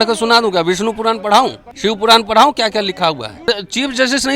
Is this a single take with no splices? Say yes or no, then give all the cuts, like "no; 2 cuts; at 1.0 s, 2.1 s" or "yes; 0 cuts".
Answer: no; 2 cuts; at 1.6 s, 3.5 s